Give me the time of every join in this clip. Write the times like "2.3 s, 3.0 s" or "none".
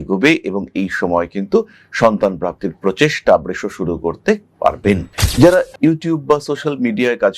5.1 s